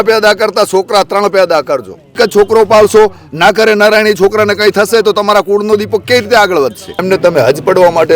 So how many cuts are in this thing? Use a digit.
2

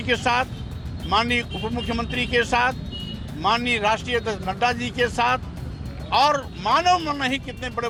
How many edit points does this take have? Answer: 0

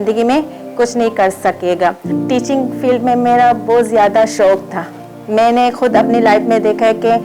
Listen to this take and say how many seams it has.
0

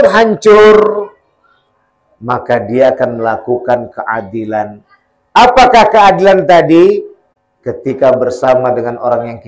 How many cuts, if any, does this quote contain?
0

